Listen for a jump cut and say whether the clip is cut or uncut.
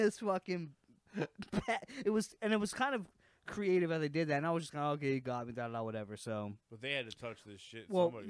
uncut